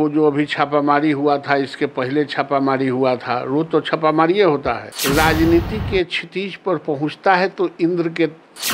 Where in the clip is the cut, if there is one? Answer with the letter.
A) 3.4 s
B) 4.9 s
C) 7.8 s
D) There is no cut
B